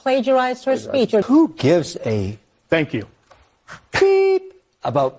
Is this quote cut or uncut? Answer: cut